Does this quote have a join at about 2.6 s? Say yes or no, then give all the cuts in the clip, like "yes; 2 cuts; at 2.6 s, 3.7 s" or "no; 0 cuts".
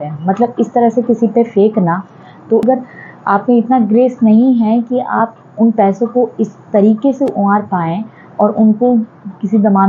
yes; 1 cut; at 2.6 s